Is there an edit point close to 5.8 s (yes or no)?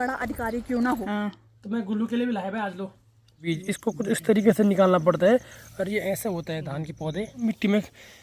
no